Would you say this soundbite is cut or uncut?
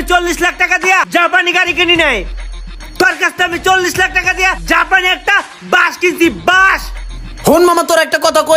uncut